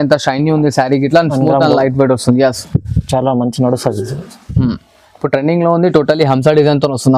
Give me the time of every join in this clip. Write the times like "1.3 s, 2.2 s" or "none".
none